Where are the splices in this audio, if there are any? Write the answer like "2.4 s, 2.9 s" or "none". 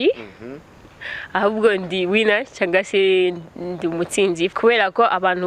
4.5 s